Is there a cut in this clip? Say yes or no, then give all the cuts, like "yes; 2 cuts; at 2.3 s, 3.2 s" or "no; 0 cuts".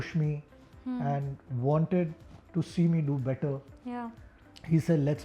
no; 0 cuts